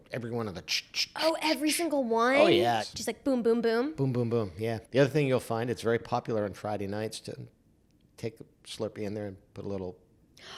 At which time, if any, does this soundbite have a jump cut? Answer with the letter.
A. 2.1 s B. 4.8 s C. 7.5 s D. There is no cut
B